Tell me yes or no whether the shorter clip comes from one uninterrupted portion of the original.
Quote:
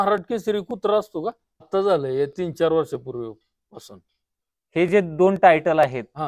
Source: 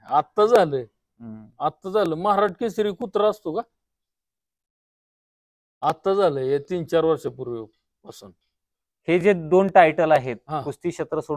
no